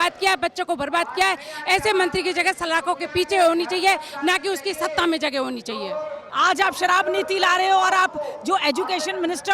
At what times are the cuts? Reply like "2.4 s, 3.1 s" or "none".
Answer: 6.2 s

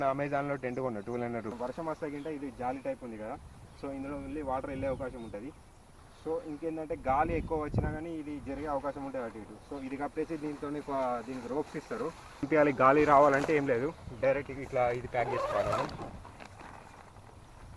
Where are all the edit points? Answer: 1.5 s, 12.5 s

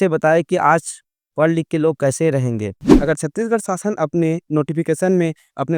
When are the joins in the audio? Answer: 2.9 s

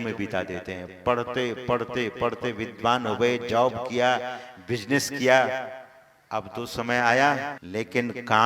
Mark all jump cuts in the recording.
7.6 s

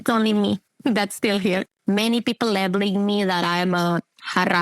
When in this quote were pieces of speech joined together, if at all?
1.7 s

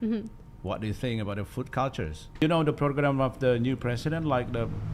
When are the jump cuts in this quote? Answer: 2.4 s

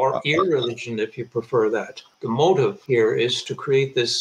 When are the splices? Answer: 2.1 s, 2.8 s

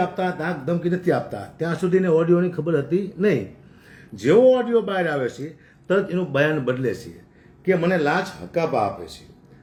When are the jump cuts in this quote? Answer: none

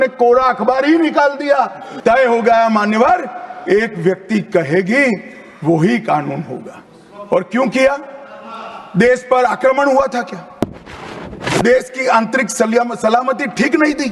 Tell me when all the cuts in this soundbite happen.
1.9 s

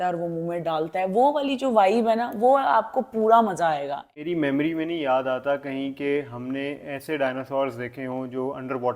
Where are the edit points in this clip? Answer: 4.2 s

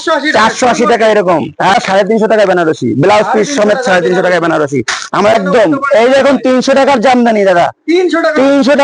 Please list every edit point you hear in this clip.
1.7 s, 5.4 s

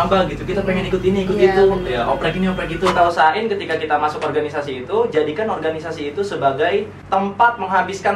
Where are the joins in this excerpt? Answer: 2.9 s, 7.0 s

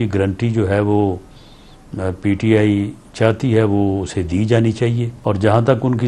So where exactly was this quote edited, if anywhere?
5.1 s

